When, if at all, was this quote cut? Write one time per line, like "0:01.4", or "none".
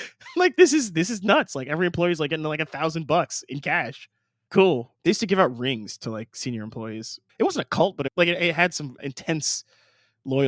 0:04.9
0:07.2
0:08.1
0:09.0